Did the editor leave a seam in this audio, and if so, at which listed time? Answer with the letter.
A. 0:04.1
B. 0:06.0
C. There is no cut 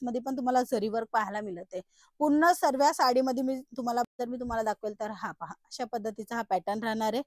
A